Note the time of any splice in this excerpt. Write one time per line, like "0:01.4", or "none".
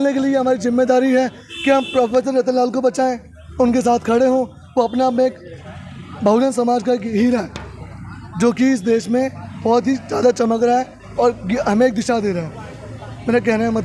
none